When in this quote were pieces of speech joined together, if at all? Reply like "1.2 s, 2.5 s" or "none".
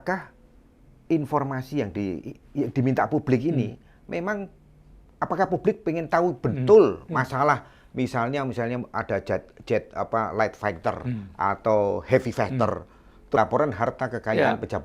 13.4 s